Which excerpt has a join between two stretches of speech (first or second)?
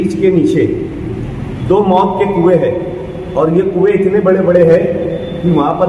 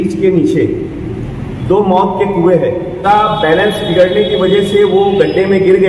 second